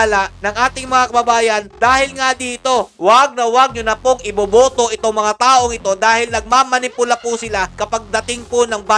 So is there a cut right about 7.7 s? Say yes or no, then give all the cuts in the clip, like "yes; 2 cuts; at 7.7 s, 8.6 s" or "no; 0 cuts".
yes; 2 cuts; at 2.9 s, 7.7 s